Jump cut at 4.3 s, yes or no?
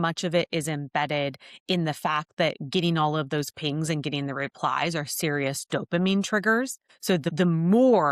no